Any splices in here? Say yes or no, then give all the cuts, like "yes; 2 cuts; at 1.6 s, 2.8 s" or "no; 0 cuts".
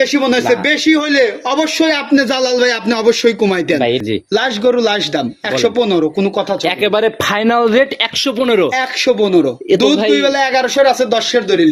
yes; 1 cut; at 4.0 s